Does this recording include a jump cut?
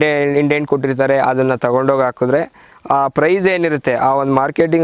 no; 0 cuts

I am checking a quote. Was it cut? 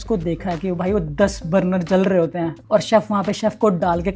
yes; 1 cut; at 2.6 s

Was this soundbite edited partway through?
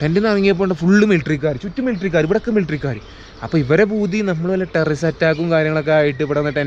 no; 0 cuts

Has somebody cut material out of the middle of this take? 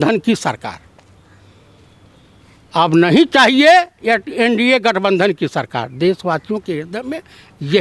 no; 0 cuts

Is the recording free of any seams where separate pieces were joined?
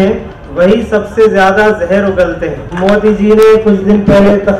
no; 1 cut; at 2.6 s

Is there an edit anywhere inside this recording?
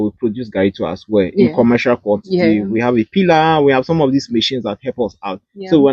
no; 0 cuts

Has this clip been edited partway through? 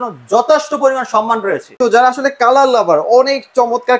yes; 1 cut; at 1.8 s

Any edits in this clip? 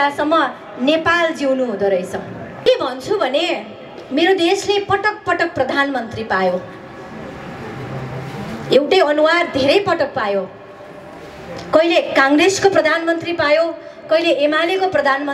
yes; 1 cut; at 2.7 s

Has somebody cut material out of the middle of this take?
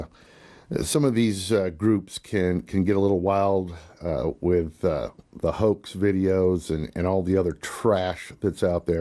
yes; 1 cut; at 1.3 s

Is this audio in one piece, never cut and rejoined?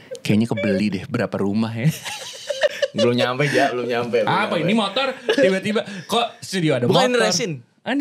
yes; 0 cuts

